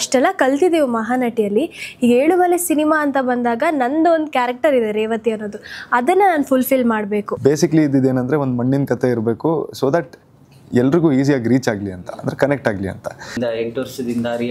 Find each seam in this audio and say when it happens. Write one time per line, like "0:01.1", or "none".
0:07.3
0:13.4